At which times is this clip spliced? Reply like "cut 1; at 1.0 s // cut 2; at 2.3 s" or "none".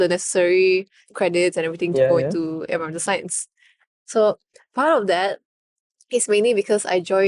none